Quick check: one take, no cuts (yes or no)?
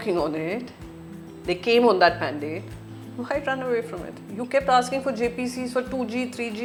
yes